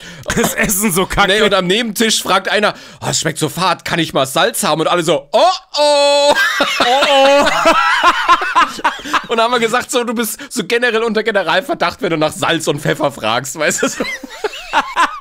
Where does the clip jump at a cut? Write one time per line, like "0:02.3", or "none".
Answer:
0:09.2